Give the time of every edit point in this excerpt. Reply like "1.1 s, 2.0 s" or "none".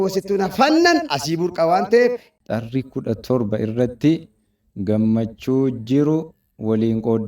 2.3 s